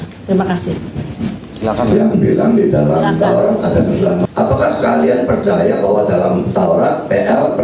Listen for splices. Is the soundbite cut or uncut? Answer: cut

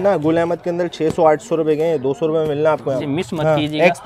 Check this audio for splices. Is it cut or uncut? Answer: cut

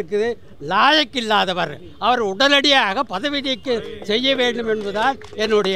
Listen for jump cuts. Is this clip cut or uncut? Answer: uncut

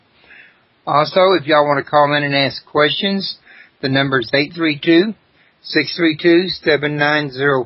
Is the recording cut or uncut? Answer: uncut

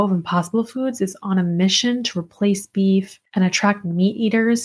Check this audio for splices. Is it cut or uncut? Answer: cut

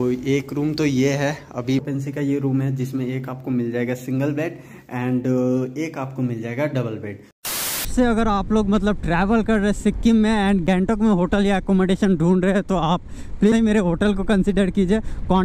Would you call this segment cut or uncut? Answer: cut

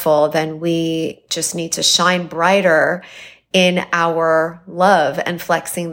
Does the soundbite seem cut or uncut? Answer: uncut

